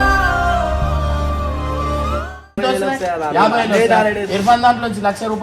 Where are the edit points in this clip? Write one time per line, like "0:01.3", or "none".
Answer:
0:02.6